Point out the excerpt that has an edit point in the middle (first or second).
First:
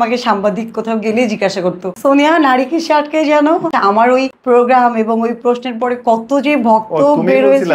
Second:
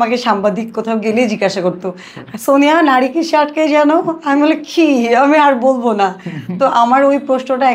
first